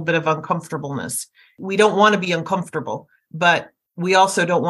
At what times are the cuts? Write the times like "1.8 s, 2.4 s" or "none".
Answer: none